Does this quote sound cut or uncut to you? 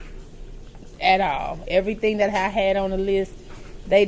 uncut